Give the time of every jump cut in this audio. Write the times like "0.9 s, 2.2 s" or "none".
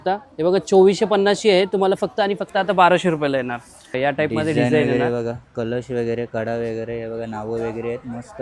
3.9 s